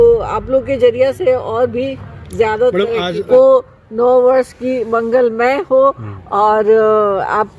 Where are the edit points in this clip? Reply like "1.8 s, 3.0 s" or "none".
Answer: 3.2 s